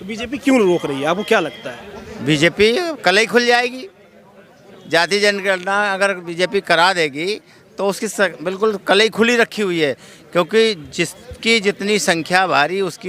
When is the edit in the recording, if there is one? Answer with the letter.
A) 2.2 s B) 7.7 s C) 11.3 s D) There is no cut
D